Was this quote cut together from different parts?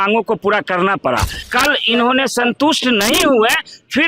yes; 1 cut; at 1.4 s

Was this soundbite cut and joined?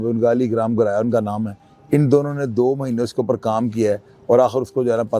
no; 0 cuts

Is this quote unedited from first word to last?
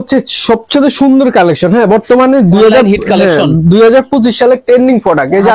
yes; 0 cuts

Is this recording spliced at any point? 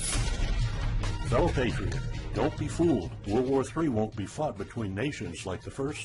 no; 0 cuts

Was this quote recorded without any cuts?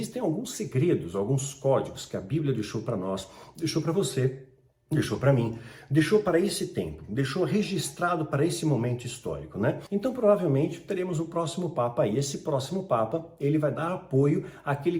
no; 1 cut; at 9.8 s

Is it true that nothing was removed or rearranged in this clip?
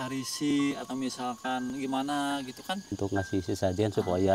no; 1 cut; at 2.9 s

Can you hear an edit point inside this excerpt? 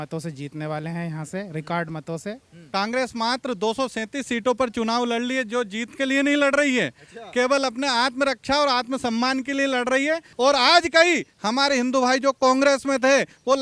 yes; 2 cuts; at 2.5 s, 10.3 s

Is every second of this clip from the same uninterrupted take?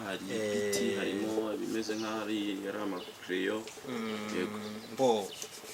yes; 0 cuts

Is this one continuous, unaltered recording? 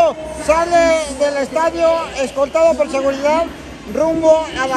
yes; 0 cuts

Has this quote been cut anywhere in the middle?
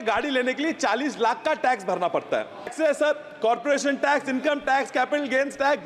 yes; 1 cut; at 2.7 s

